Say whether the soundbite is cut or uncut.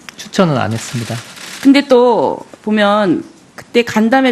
uncut